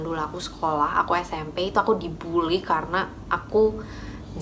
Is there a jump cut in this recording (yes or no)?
no